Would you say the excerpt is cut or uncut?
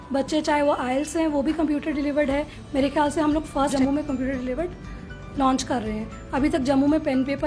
cut